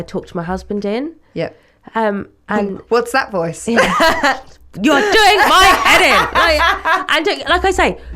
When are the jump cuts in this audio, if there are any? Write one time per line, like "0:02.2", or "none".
none